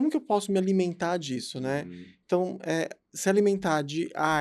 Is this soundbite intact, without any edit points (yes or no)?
yes